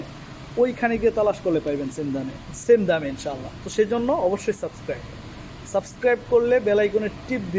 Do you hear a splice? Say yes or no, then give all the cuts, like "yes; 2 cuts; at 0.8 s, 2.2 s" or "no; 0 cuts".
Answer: no; 0 cuts